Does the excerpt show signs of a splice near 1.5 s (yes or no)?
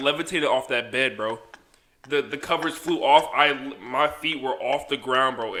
no